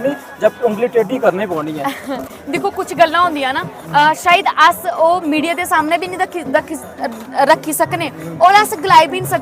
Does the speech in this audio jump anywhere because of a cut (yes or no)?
no